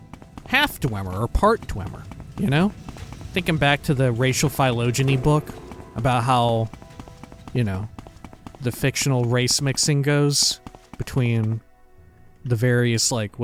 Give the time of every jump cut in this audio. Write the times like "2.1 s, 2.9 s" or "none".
none